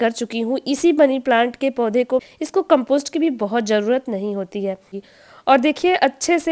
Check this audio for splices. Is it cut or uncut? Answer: cut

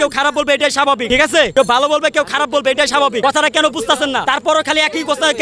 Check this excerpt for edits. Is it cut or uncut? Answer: cut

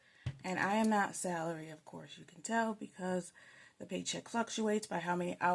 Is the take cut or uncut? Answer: uncut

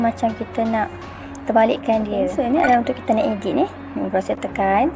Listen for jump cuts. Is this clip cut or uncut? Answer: cut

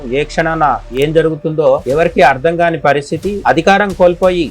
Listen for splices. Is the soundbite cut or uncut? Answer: cut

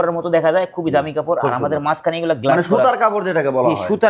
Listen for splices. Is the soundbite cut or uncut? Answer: uncut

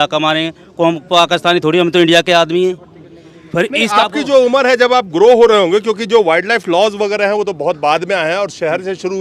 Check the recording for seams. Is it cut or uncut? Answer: uncut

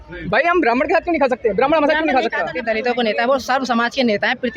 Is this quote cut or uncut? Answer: cut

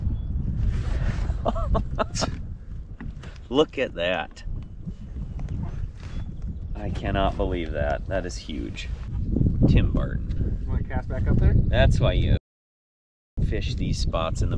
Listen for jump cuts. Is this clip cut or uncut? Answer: uncut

